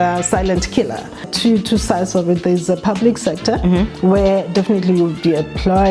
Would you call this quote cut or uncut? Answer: cut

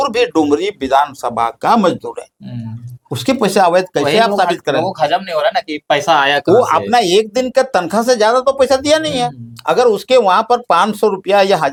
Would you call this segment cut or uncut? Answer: uncut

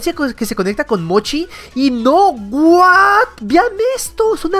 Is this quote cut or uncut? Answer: uncut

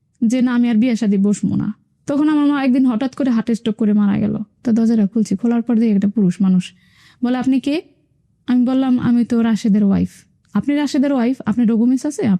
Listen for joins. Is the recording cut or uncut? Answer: cut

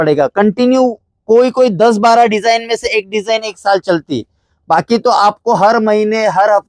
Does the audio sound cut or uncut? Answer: uncut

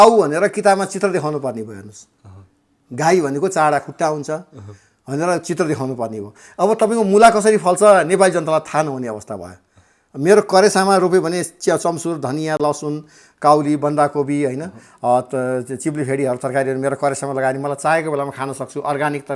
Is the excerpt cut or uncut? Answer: uncut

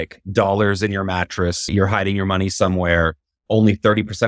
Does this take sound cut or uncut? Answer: cut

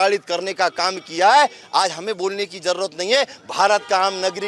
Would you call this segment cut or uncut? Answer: uncut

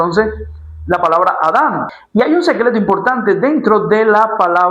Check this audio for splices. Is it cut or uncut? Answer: cut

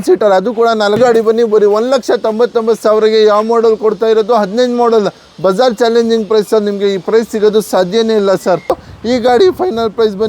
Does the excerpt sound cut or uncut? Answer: cut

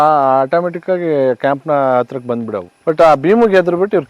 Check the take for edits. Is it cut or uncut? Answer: cut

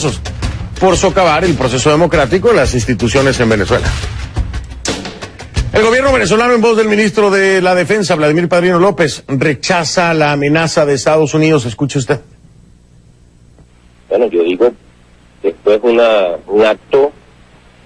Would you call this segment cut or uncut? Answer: uncut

